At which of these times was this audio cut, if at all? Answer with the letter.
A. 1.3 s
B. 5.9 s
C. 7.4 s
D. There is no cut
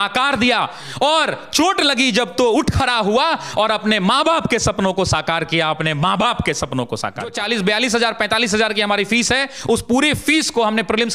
C